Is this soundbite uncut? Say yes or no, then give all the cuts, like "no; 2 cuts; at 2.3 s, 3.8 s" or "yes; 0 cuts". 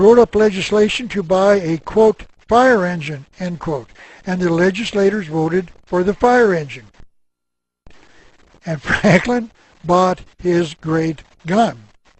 no; 1 cut; at 4.4 s